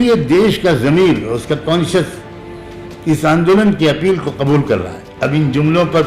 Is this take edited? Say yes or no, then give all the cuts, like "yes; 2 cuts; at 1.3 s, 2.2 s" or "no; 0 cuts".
yes; 1 cut; at 5.0 s